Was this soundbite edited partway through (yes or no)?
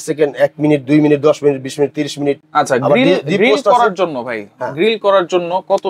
no